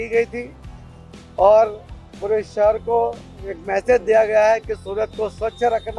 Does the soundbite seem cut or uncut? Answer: uncut